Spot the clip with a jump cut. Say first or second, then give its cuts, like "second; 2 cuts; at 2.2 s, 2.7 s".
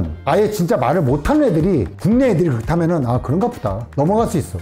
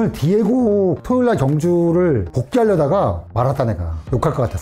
second; 1 cut; at 1.0 s